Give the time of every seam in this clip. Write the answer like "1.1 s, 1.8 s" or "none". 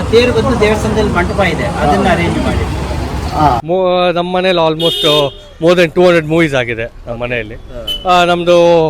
3.6 s